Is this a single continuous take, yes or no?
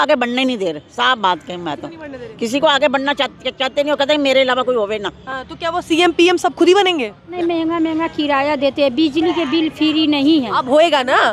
no